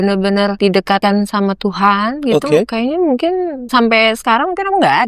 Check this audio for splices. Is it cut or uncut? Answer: cut